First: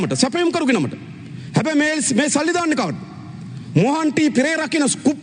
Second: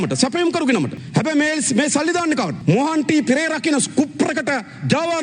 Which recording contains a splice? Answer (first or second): second